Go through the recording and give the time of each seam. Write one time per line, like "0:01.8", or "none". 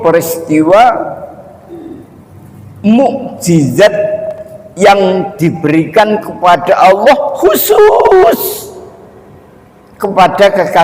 none